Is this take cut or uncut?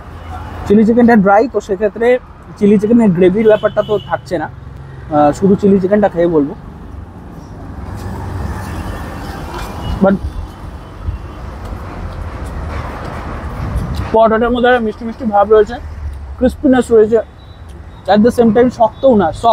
uncut